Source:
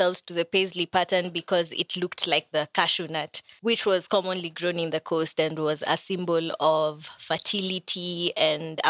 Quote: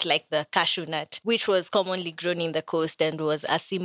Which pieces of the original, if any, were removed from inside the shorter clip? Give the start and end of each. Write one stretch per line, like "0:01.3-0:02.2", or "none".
0:03.3-0:03.5